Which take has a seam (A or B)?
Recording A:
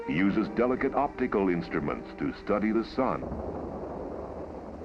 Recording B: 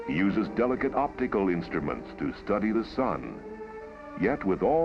B